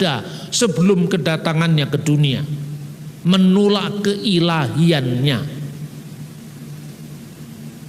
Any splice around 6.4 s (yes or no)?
no